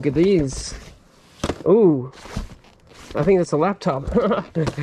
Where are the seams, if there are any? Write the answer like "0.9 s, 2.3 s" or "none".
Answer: none